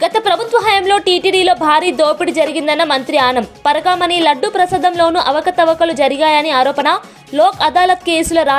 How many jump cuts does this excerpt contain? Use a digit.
0